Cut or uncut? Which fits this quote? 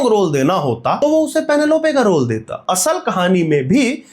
cut